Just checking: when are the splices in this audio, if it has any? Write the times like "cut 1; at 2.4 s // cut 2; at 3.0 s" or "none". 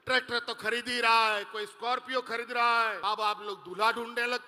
cut 1; at 2.9 s